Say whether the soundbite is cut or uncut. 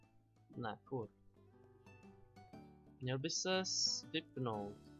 uncut